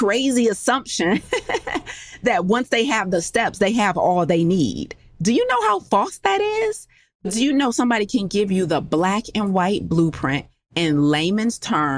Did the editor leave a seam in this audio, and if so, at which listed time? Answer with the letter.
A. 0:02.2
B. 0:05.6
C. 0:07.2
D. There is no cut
C